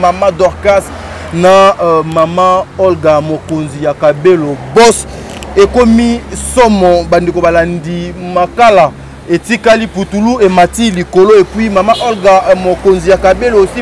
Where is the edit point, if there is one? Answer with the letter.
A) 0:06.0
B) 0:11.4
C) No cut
C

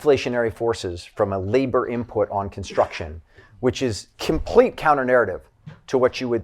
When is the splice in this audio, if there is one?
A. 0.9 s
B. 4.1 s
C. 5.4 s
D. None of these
B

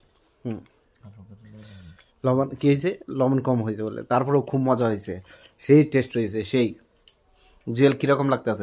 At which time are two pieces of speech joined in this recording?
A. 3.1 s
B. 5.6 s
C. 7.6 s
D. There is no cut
D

